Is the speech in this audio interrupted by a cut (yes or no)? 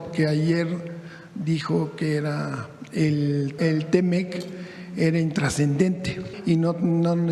yes